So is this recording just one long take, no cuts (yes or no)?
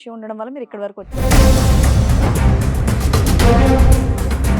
no